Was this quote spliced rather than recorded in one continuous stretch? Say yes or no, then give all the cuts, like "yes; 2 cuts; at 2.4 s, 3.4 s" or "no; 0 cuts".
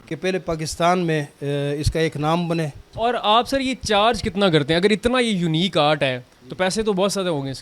yes; 1 cut; at 2.8 s